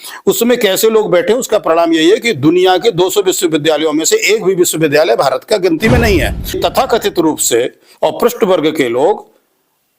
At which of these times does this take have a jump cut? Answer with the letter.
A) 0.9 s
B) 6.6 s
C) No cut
B